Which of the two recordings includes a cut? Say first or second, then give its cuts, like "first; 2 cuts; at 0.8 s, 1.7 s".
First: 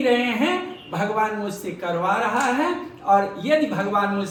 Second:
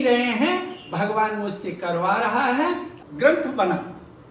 second; 1 cut; at 2.9 s